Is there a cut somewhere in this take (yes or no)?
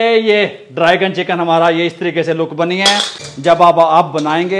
yes